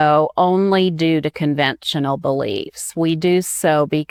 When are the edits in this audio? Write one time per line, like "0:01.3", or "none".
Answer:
none

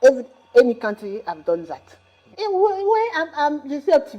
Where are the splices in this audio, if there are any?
0:02.4

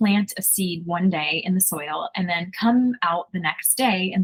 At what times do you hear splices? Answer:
none

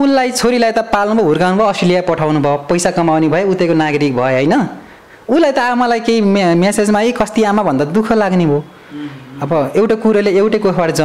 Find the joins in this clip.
none

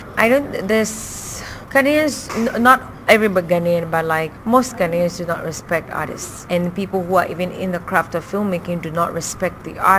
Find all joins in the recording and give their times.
0:03.3

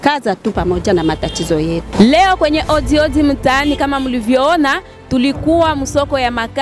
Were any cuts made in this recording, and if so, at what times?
0:01.9

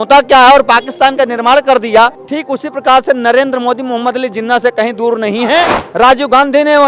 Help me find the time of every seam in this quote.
0:02.3
0:05.8

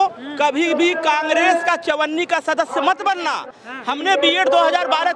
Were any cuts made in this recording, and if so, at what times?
0:03.6

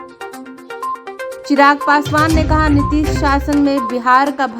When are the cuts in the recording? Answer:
none

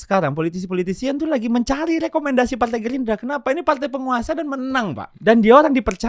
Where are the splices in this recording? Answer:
0:05.1

